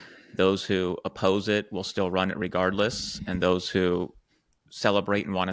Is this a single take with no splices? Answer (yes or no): yes